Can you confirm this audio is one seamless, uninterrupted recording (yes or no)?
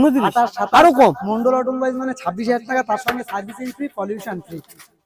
yes